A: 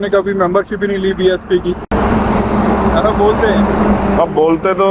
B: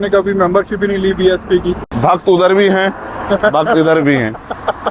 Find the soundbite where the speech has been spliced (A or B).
B